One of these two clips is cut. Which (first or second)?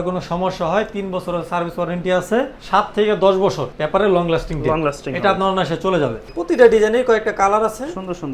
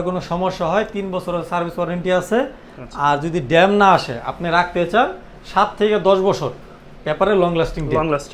first